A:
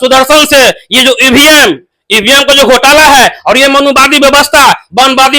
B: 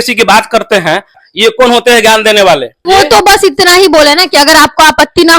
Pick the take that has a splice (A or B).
B